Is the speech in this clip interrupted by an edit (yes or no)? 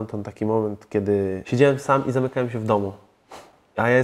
yes